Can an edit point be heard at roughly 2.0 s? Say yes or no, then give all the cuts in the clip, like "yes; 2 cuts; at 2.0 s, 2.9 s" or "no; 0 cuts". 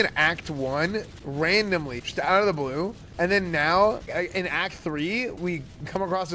yes; 3 cuts; at 2.0 s, 4.1 s, 5.4 s